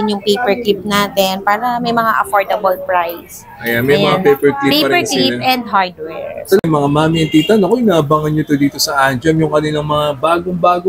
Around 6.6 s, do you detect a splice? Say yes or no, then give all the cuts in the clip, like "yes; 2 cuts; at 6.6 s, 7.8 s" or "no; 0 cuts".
yes; 1 cut; at 6.6 s